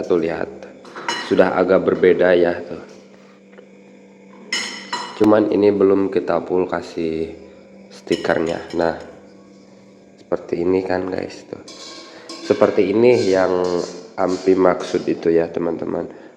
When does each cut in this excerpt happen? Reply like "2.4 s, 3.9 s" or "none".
none